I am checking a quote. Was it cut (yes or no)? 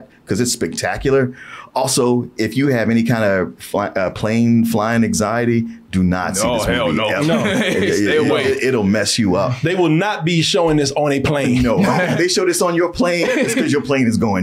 yes